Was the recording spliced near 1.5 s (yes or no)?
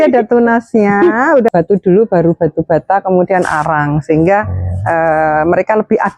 yes